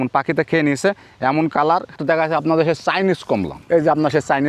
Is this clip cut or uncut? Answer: cut